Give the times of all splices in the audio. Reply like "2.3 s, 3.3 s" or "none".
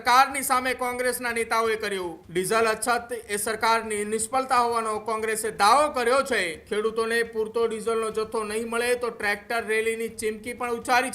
2.2 s, 6.6 s